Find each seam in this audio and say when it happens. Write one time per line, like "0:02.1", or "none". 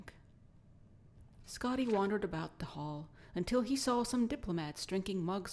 0:04.6